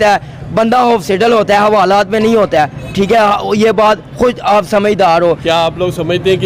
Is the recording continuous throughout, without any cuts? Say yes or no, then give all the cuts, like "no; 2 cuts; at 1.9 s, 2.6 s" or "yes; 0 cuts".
yes; 0 cuts